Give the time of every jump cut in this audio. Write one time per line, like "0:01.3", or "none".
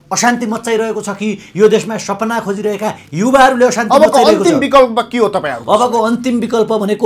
none